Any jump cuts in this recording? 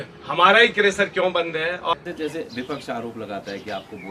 yes; 1 cut; at 1.9 s

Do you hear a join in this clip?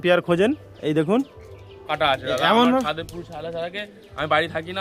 yes; 1 cut; at 1.8 s

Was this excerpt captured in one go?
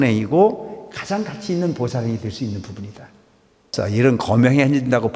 no; 1 cut; at 3.7 s

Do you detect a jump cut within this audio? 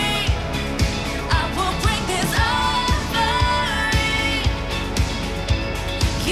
no; 0 cuts

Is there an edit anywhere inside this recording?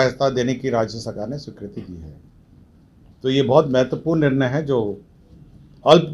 no; 0 cuts

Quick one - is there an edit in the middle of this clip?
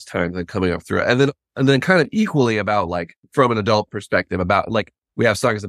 yes; 1 cut; at 3.2 s

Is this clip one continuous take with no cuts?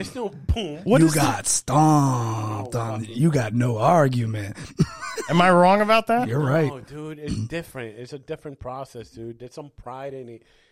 yes; 0 cuts

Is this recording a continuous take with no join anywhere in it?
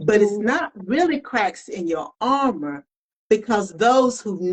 yes; 0 cuts

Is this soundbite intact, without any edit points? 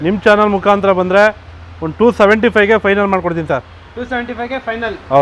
yes; 0 cuts

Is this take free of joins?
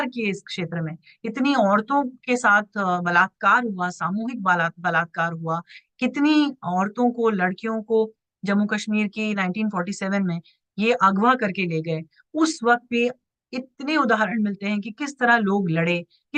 yes; 0 cuts

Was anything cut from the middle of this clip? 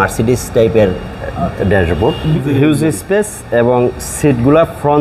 yes; 1 cut; at 2.3 s

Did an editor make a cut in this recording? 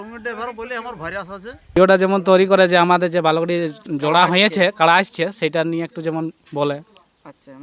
yes; 1 cut; at 1.8 s

